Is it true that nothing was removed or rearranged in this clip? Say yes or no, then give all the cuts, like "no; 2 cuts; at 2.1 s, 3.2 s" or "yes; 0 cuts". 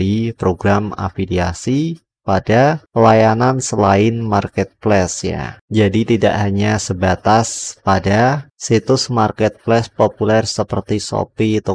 yes; 0 cuts